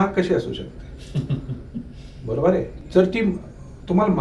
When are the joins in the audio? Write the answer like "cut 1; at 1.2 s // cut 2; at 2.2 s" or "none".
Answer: cut 1; at 2.8 s